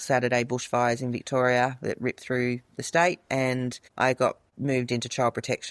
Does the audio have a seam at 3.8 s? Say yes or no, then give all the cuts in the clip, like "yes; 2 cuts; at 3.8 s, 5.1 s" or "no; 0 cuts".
yes; 2 cuts; at 3.8 s, 4.5 s